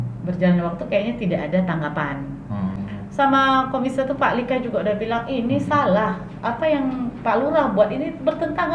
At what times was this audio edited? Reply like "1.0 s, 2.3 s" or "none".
2.8 s